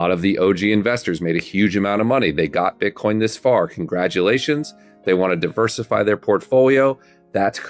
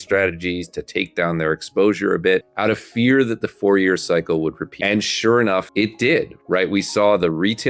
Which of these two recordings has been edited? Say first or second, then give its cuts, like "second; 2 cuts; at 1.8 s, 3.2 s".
second; 3 cuts; at 2.5 s, 4.7 s, 5.7 s